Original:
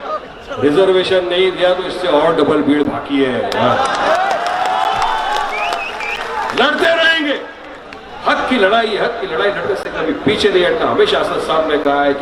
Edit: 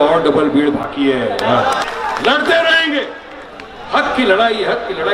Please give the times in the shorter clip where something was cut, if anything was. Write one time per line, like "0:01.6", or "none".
0:01.8